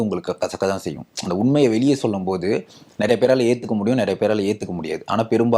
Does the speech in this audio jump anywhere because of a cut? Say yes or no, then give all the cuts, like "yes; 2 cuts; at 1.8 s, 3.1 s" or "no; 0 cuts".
no; 0 cuts